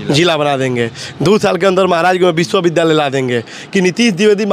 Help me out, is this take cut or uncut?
cut